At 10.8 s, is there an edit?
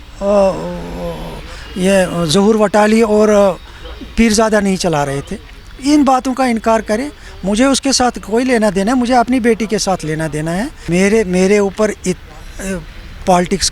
yes; 1 cut; at 10.8 s

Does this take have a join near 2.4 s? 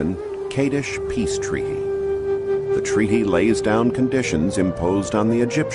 yes; 1 cut; at 2.4 s

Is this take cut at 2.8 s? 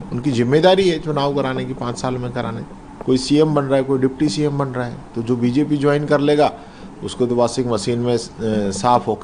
yes; 1 cut; at 2.8 s

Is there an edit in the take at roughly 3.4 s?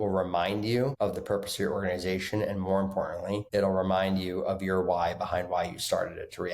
yes; 2 cuts; at 0.9 s, 3.4 s

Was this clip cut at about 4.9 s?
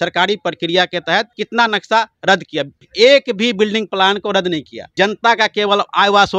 yes; 3 cuts; at 1.4 s, 2.8 s, 4.9 s

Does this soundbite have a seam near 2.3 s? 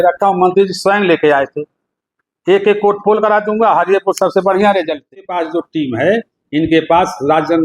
no; 1 cut; at 5.2 s

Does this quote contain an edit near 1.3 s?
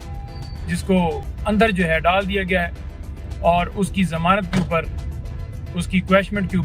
yes; 1 cut; at 1.3 s

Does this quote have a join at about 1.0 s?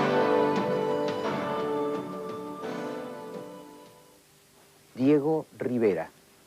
yes; 1 cut; at 1.0 s

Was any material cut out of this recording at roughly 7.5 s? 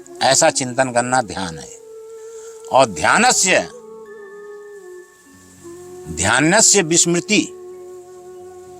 yes; 1 cut; at 7.5 s

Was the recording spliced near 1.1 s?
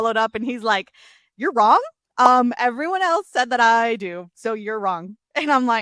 no; 0 cuts

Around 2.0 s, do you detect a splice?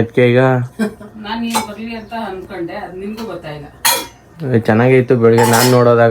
no; 0 cuts

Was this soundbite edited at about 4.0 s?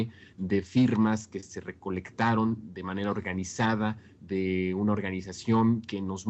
no; 0 cuts

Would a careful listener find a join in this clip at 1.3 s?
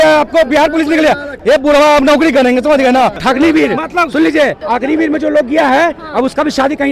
yes; 3 cuts; at 1.3 s, 3.2 s, 4.6 s

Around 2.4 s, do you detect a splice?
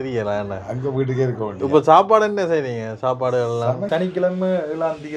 no; 1 cut; at 3.9 s

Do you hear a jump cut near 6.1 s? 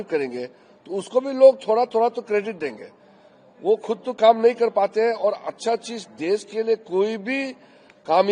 no; 0 cuts

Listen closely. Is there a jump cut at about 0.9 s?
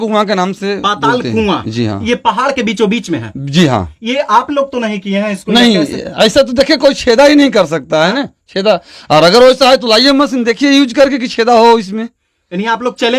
no; 0 cuts

